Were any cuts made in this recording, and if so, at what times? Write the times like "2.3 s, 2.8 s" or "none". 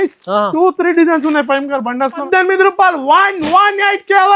2.2 s